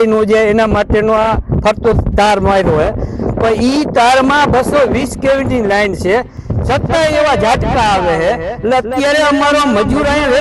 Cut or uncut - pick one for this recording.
uncut